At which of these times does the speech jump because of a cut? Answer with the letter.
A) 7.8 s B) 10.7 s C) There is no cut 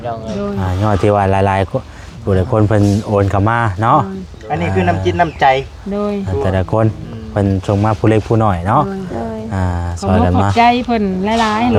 C